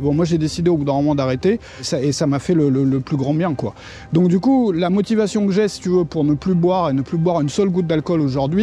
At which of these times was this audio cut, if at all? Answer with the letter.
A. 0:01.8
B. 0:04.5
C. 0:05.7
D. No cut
D